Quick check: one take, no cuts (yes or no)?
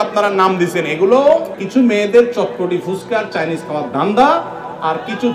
no